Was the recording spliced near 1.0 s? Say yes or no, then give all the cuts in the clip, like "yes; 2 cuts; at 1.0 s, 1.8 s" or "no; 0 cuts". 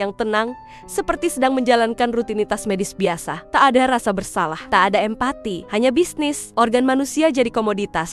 no; 4 cuts; at 3.3 s, 4.6 s, 5.5 s, 6.4 s